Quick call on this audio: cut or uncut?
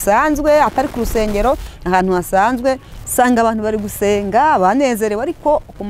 cut